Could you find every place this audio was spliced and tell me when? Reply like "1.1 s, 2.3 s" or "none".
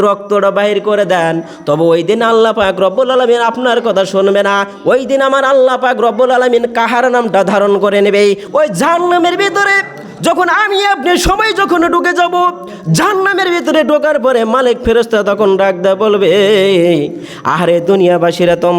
8.4 s